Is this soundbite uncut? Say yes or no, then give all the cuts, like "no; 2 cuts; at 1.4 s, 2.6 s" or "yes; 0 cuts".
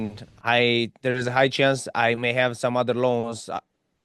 yes; 0 cuts